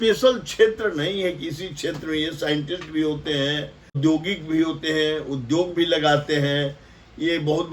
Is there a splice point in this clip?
yes; 1 cut; at 4.0 s

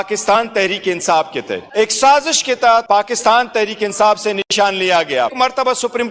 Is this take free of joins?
no; 2 cuts; at 1.7 s, 5.3 s

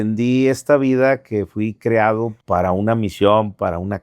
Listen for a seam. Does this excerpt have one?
yes; 1 cut; at 2.4 s

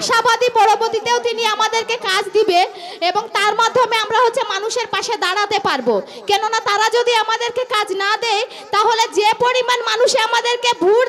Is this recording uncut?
yes; 0 cuts

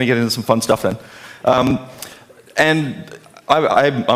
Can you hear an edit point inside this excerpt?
yes; 1 cut; at 2.5 s

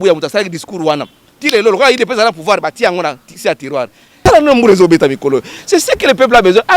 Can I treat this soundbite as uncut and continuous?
no; 1 cut; at 4.0 s

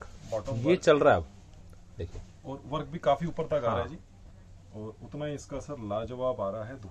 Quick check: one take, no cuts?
yes; 0 cuts

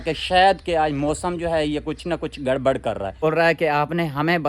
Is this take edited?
yes; 1 cut; at 3.2 s

